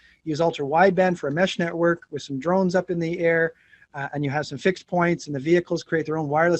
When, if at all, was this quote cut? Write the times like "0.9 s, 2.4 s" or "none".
none